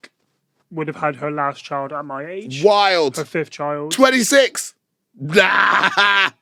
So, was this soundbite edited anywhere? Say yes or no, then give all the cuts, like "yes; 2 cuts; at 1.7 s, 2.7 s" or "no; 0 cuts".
no; 0 cuts